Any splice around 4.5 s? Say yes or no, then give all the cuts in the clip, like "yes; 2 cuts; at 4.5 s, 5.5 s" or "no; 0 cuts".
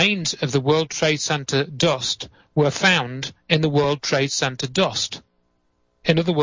yes; 1 cut; at 4.5 s